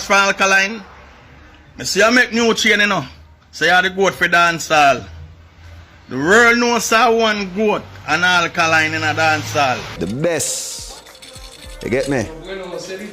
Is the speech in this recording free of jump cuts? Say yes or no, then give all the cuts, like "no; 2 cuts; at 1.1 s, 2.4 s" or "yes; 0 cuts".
no; 1 cut; at 9.9 s